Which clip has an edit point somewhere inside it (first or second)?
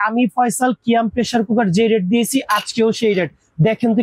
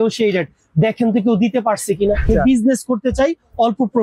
second